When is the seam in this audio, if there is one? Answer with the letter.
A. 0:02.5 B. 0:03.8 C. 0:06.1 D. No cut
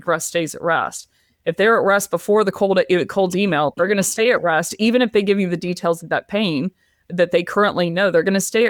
D